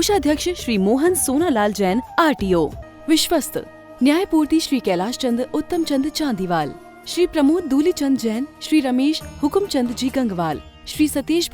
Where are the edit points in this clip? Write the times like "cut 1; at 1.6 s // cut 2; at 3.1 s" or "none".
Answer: cut 1; at 2.8 s